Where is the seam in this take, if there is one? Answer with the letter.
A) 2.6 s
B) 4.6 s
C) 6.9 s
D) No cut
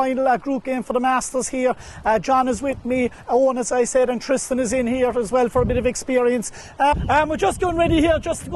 C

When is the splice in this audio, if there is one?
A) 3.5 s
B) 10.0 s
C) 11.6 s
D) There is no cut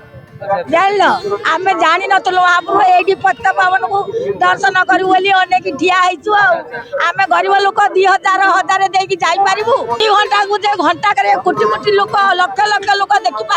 B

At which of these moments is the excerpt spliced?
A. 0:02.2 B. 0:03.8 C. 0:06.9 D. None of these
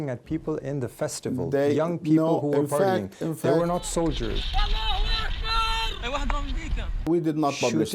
C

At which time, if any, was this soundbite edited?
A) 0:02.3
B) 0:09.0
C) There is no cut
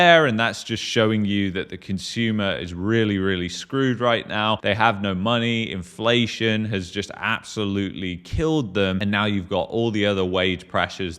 B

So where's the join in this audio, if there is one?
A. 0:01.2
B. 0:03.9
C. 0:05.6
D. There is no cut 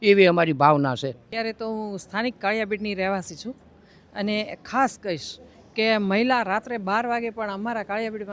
A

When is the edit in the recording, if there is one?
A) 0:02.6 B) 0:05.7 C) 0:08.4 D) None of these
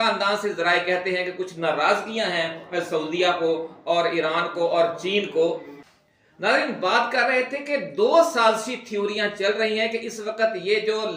D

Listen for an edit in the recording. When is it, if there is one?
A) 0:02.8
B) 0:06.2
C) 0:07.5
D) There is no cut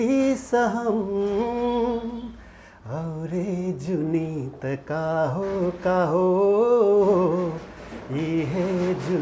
D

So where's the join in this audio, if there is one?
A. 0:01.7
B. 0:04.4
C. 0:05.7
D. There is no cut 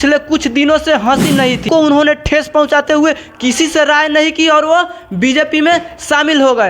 A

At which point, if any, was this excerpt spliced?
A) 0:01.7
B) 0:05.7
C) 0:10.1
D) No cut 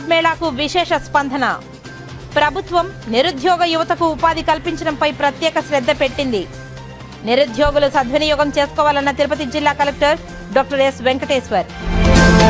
D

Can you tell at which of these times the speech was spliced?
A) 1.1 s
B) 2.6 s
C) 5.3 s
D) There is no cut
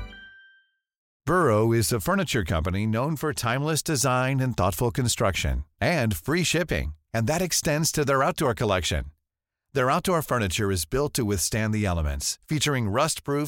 A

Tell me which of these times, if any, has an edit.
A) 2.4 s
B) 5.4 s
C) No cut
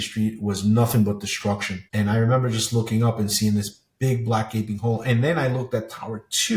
C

